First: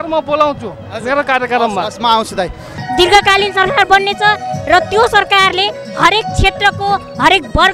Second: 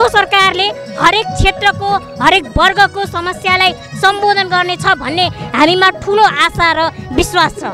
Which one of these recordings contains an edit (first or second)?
first